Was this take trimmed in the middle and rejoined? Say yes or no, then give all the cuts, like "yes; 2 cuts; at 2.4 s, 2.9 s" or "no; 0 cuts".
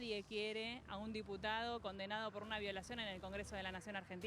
no; 0 cuts